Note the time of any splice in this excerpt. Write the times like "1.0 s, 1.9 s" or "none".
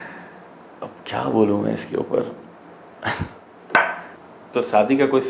4.1 s